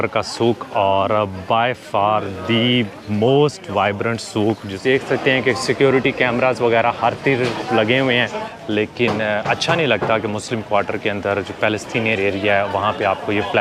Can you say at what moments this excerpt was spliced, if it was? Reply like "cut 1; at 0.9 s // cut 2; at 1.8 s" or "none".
cut 1; at 4.7 s // cut 2; at 8.4 s